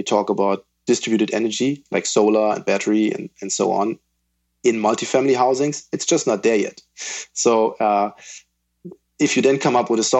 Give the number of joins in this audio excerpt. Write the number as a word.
zero